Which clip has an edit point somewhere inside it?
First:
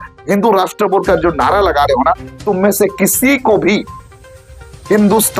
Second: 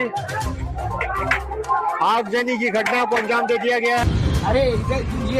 second; 1 cut; at 4.1 s

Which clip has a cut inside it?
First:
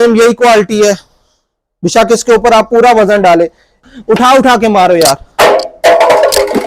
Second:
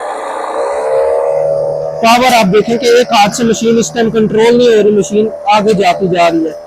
first; 1 cut; at 3.8 s

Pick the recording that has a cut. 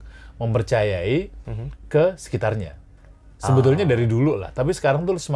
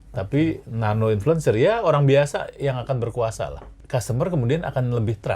second; 1 cut; at 3.8 s

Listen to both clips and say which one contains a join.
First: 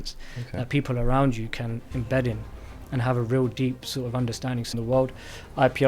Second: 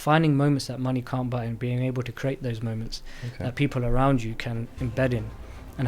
first; 1 cut; at 4.7 s

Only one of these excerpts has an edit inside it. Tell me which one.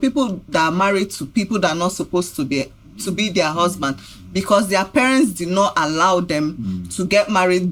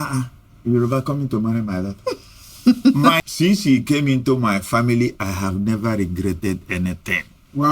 second; 1 cut; at 3.2 s

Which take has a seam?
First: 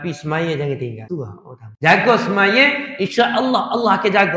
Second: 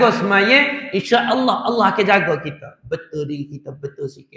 first; 1 cut; at 1.1 s

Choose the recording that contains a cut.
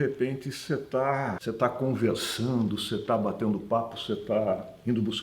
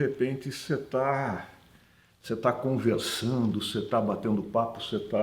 first; 1 cut; at 1.4 s

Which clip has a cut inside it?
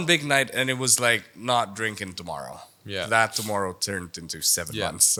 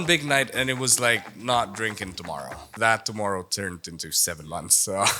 second; 1 cut; at 2.7 s

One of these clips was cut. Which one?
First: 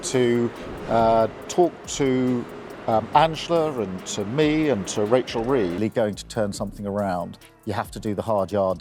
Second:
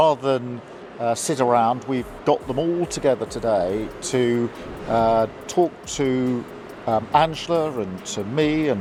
first; 1 cut; at 5.7 s

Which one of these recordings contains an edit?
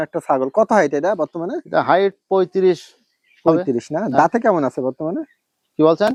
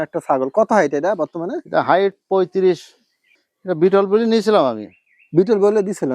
second; 1 cut; at 3.3 s

